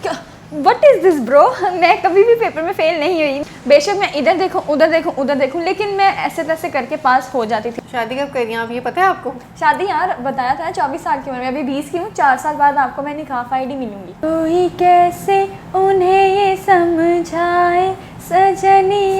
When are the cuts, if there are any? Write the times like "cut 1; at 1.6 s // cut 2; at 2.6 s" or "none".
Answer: cut 1; at 3.4 s // cut 2; at 7.7 s // cut 3; at 14.1 s